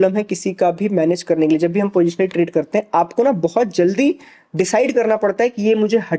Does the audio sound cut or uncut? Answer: uncut